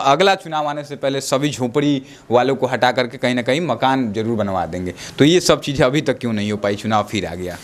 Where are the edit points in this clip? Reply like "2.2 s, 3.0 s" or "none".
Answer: none

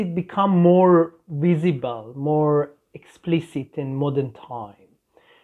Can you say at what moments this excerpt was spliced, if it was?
none

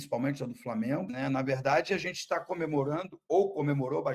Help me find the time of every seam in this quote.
1.1 s

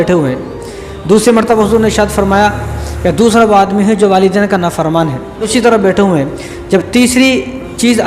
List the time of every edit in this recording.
5.5 s

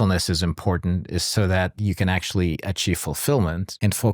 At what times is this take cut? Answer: none

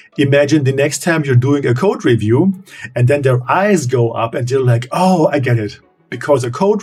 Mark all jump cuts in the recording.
none

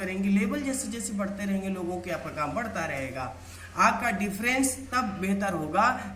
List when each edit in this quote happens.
none

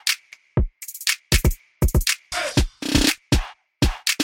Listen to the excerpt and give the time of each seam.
1.7 s

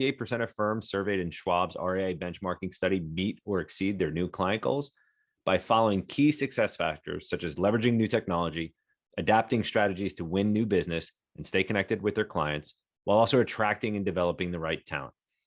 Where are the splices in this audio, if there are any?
none

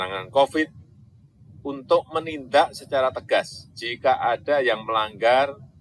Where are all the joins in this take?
none

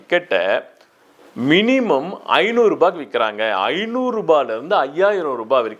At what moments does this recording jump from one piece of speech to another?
none

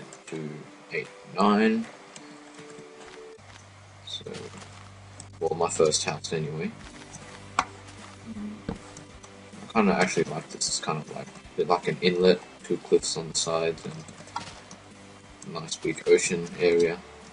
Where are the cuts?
11.6 s

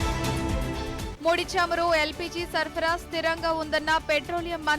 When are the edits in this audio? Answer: 1.1 s

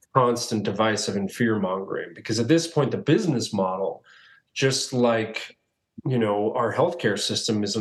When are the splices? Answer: none

